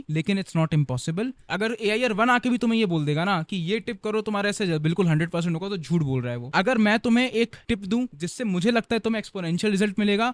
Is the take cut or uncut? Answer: cut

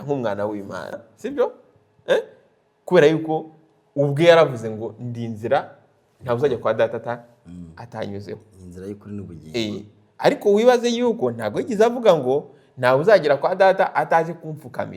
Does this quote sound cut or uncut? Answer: cut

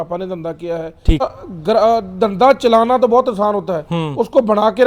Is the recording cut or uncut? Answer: cut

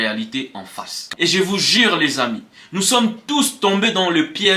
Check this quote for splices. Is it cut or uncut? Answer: cut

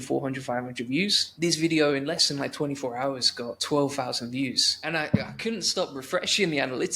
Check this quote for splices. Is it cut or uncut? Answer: cut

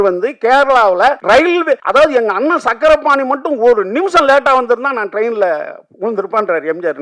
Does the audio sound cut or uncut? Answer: cut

